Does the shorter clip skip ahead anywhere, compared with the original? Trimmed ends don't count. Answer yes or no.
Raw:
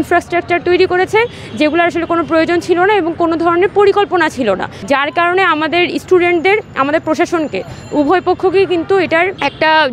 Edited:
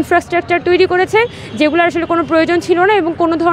no